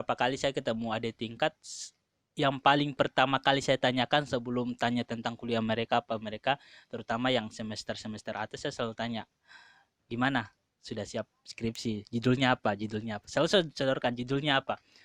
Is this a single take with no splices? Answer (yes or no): yes